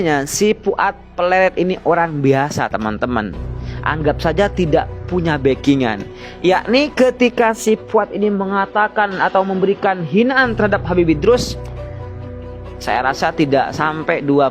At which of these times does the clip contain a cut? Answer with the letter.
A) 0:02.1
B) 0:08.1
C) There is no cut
C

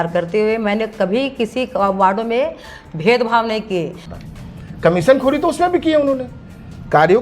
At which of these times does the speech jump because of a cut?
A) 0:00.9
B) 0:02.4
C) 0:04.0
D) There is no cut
C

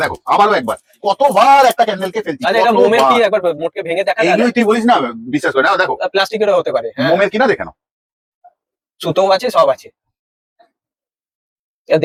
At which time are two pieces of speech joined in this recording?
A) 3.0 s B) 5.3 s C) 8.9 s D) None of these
D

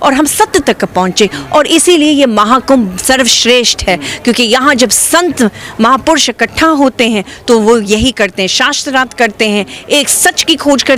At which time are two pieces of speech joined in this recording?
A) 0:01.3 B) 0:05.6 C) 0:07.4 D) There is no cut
D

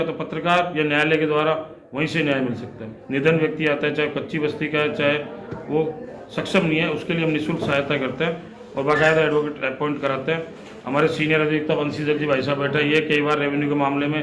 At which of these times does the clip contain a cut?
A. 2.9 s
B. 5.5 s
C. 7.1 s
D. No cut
A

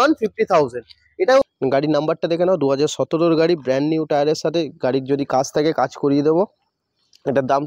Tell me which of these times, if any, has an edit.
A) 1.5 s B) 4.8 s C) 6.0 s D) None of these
A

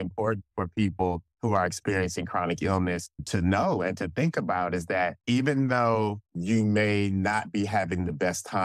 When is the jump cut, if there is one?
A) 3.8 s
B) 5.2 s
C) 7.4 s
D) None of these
B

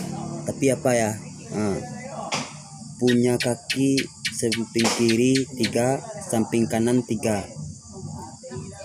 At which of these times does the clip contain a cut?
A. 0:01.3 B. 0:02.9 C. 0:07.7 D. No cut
D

